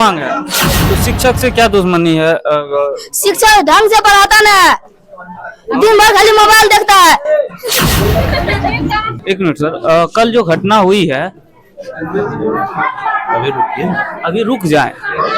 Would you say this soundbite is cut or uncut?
cut